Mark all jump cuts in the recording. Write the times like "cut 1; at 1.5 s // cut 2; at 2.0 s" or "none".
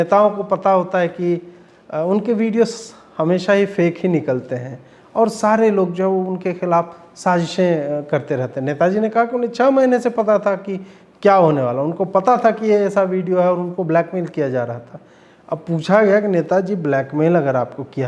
none